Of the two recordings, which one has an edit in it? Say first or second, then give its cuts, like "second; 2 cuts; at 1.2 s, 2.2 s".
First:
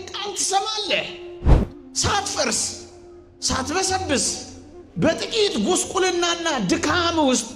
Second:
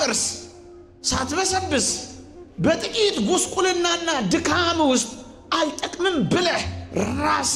first; 1 cut; at 1.4 s